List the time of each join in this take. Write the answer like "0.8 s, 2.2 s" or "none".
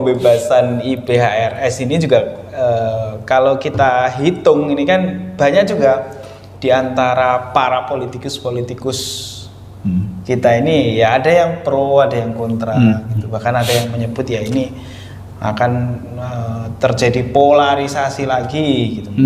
none